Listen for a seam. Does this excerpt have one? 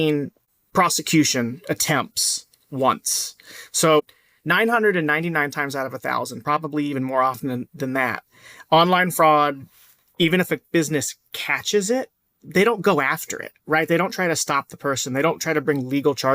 no; 0 cuts

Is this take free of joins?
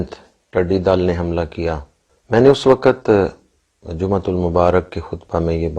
yes; 0 cuts

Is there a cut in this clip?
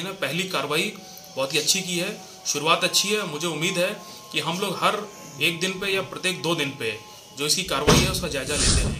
no; 0 cuts

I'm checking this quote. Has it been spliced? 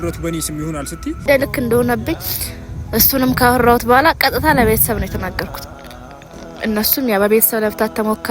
yes; 1 cut; at 1.2 s

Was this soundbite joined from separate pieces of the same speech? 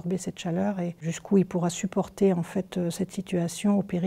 no; 0 cuts

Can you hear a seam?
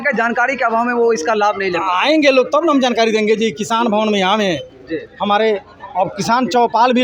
no; 0 cuts

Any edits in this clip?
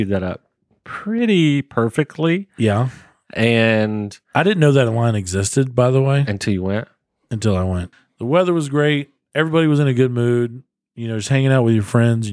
yes; 1 cut; at 7.9 s

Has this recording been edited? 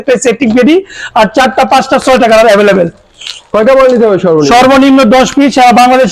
no; 0 cuts

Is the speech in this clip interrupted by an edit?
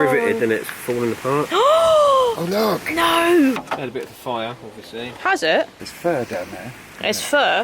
yes; 2 cuts; at 3.7 s, 5.9 s

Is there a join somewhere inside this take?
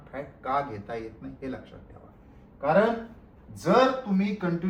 no; 0 cuts

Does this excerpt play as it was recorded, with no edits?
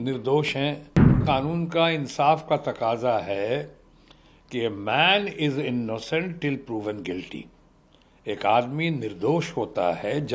no; 1 cut; at 1.2 s

